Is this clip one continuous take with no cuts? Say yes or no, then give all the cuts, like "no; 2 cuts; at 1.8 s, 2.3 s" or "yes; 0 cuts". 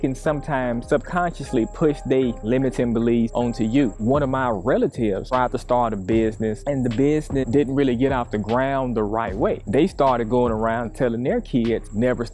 no; 1 cut; at 3.9 s